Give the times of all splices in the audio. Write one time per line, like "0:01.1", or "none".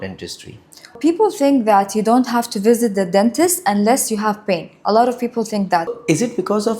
0:00.9
0:05.9